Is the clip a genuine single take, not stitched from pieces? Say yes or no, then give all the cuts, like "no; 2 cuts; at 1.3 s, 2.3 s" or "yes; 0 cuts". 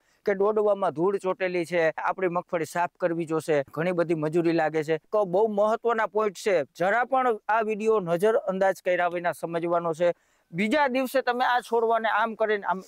no; 4 cuts; at 2.0 s, 3.7 s, 5.1 s, 10.3 s